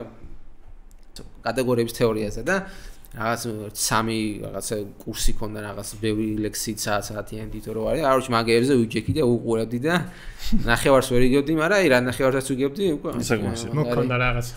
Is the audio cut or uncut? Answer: cut